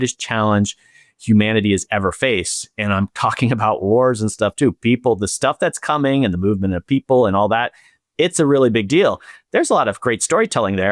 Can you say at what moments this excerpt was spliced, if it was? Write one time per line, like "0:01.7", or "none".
none